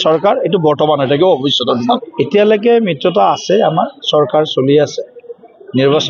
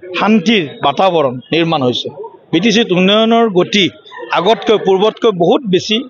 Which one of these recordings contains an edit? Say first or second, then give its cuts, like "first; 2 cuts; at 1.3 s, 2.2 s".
first; 1 cut; at 2.0 s